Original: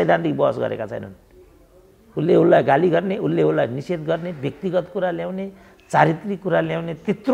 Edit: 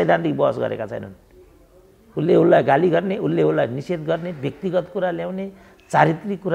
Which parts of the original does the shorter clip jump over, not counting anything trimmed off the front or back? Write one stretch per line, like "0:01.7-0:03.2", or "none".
none